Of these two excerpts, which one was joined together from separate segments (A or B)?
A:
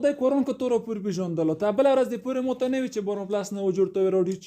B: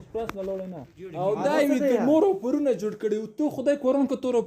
B